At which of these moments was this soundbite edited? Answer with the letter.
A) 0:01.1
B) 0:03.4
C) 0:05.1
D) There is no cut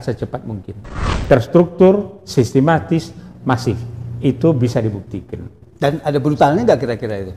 A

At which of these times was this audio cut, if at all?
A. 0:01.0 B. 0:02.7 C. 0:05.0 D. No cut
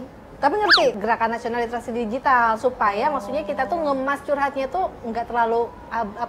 A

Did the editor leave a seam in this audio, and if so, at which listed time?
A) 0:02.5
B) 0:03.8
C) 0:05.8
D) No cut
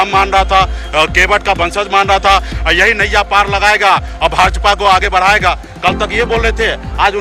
A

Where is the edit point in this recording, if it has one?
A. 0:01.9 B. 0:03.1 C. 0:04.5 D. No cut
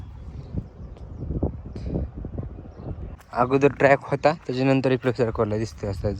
B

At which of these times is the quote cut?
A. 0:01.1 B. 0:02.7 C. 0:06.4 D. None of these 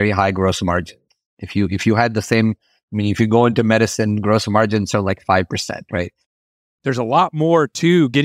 C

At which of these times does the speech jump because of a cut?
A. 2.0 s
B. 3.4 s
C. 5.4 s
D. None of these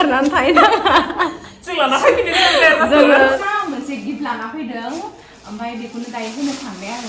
B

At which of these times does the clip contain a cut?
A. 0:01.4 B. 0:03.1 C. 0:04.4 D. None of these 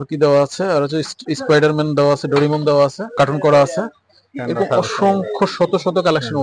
B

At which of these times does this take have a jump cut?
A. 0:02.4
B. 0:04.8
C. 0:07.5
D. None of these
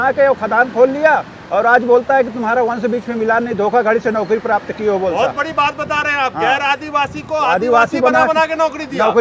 D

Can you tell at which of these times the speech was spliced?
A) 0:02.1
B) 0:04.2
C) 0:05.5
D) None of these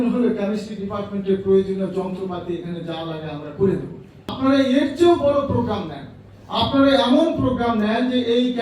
B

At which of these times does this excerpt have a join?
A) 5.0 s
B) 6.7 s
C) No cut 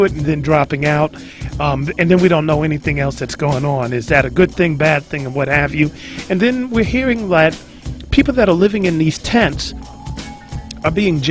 B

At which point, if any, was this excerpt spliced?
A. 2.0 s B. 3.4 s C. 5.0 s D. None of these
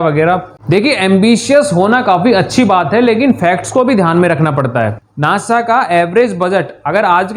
C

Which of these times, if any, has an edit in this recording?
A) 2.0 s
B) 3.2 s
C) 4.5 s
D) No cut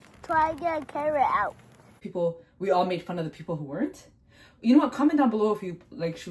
A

